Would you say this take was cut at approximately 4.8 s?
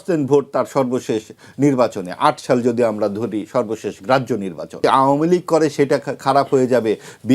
yes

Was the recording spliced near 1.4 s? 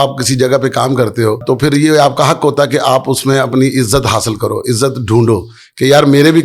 yes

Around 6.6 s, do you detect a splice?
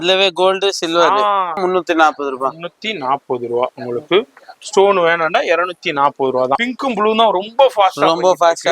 yes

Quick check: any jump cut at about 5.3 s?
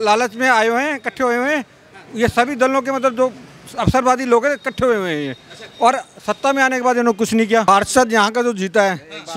no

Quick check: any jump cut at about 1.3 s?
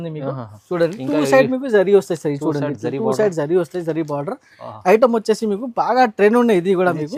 no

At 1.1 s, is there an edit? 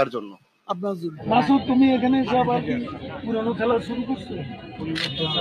yes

